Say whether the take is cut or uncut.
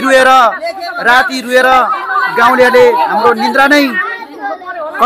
uncut